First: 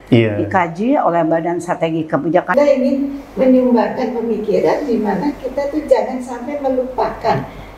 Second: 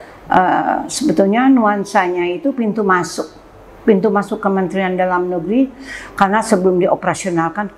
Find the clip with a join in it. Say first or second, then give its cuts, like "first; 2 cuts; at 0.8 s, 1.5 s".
first; 1 cut; at 2.5 s